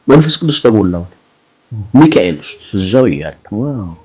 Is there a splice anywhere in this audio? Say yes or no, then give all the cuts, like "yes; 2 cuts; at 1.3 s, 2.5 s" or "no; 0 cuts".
yes; 1 cut; at 2.5 s